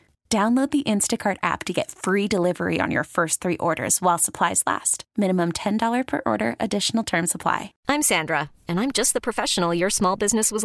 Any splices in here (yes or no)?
yes